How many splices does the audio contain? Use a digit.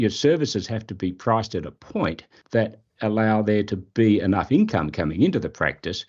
1